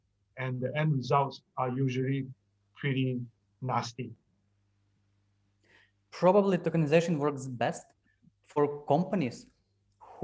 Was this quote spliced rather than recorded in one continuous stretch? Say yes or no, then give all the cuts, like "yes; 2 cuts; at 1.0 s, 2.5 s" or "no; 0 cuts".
no; 0 cuts